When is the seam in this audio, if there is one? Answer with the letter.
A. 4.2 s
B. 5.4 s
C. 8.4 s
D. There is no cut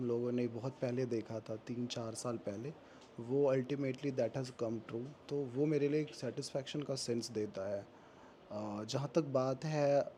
D